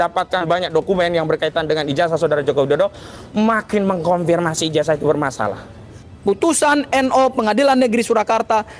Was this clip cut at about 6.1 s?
yes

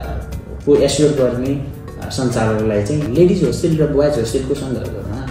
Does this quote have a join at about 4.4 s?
no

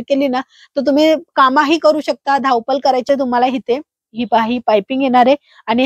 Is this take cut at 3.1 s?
yes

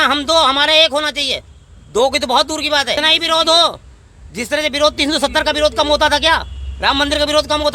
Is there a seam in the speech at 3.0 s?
yes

